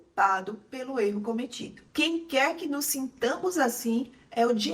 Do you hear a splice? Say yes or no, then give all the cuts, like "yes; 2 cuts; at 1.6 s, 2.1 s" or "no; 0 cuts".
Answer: no; 0 cuts